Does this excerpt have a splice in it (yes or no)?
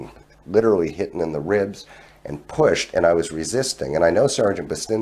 no